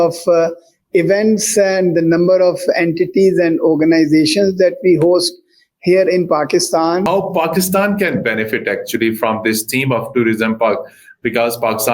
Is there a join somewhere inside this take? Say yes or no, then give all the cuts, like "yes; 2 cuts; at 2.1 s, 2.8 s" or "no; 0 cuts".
yes; 1 cut; at 7.0 s